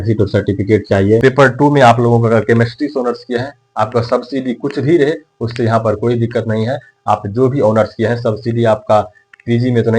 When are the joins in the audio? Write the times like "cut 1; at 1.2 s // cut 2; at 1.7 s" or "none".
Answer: cut 1; at 1.2 s